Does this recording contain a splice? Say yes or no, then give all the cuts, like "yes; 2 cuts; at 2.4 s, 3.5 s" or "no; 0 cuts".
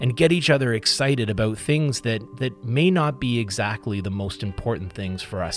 no; 0 cuts